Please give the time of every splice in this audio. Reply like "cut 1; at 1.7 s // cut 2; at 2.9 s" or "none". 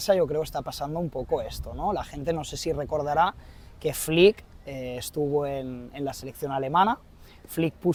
none

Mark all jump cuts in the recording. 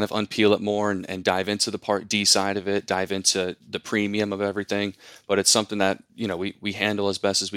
none

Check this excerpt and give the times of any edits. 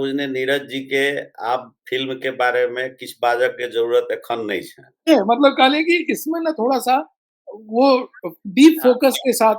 cut 1; at 5.0 s

